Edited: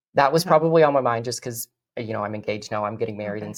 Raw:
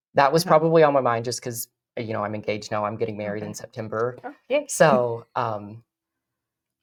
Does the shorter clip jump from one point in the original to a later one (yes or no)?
no